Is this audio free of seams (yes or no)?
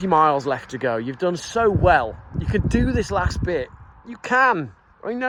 yes